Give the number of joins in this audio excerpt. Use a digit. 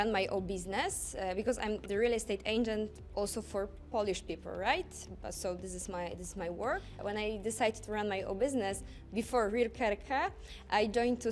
1